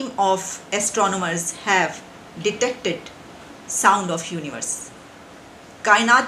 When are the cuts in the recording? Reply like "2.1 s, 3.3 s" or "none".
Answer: none